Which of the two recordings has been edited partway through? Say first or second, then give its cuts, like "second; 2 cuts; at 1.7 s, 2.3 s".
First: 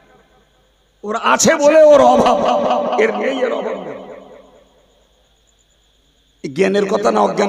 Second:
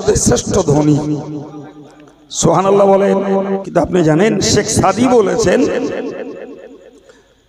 second; 1 cut; at 3.6 s